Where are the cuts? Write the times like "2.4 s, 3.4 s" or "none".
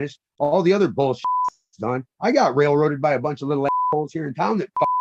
none